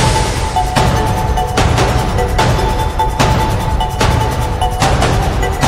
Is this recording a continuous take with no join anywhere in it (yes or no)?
yes